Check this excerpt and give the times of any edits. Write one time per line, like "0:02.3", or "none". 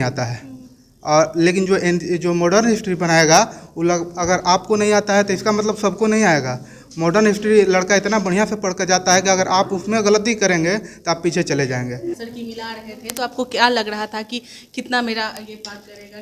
0:12.2